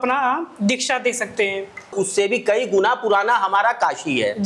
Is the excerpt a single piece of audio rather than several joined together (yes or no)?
no